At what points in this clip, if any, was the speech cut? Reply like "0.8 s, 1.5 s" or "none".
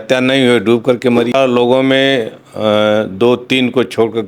1.3 s